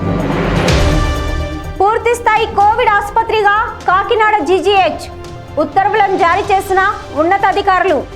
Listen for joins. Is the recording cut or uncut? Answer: cut